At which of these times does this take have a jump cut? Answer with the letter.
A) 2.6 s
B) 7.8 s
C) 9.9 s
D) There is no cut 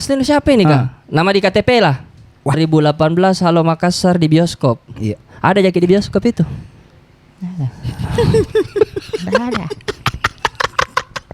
A